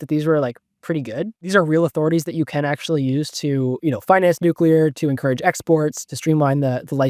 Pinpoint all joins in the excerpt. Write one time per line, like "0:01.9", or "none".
0:01.4
0:06.0